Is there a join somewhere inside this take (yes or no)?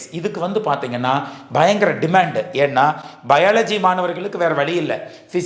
no